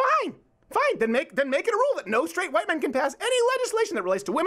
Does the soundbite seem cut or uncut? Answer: uncut